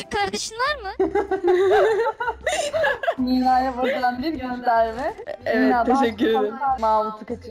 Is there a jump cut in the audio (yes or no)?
yes